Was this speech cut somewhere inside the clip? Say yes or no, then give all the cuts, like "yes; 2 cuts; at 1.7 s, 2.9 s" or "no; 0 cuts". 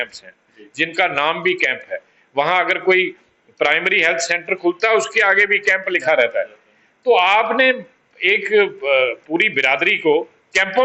no; 0 cuts